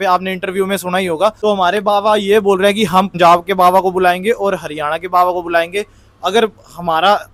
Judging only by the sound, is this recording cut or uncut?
uncut